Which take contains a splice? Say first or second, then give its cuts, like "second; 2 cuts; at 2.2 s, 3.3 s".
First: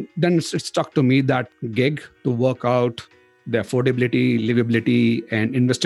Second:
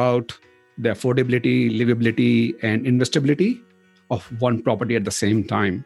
first; 1 cut; at 1.6 s